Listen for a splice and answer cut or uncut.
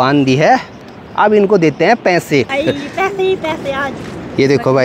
cut